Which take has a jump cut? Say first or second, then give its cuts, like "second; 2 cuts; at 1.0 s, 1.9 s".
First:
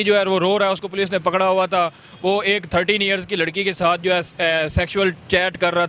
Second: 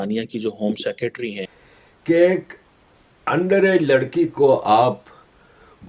second; 1 cut; at 1.5 s